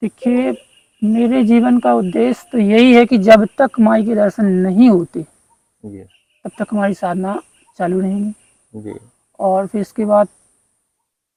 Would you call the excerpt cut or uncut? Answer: uncut